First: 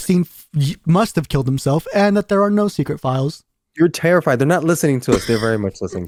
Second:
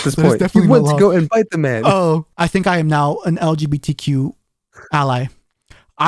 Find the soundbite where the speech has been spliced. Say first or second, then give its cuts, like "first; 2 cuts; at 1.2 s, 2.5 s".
second; 1 cut; at 2.3 s